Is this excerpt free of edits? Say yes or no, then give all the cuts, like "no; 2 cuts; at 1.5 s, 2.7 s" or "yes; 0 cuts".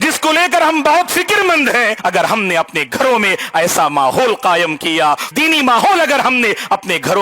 no; 2 cuts; at 2.0 s, 5.3 s